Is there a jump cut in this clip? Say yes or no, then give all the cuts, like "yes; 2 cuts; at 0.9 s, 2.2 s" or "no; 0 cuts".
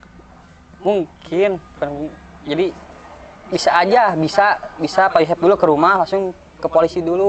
no; 0 cuts